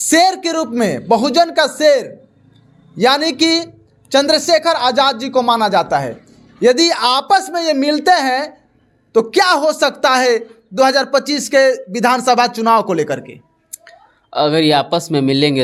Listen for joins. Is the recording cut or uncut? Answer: uncut